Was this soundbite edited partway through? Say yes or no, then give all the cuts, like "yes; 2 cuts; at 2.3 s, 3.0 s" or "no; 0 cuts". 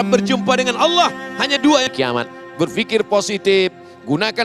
yes; 1 cut; at 1.9 s